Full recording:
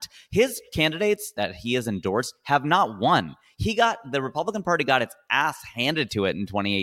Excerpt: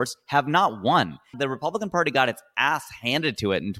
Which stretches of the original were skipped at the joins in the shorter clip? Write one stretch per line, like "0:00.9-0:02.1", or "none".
0:03.5-0:04.0